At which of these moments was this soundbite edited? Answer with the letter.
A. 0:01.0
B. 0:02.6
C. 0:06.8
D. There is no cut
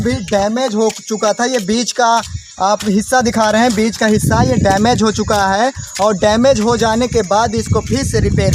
D